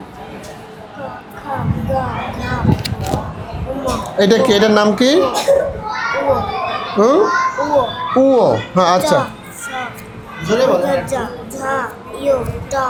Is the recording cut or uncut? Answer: uncut